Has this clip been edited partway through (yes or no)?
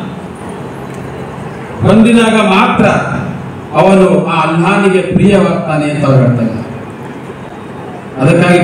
no